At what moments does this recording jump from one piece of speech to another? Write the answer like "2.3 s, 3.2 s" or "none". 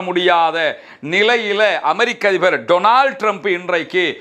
none